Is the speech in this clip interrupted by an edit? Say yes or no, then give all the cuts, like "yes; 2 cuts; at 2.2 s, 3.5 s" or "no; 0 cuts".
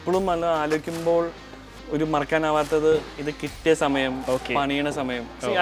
no; 0 cuts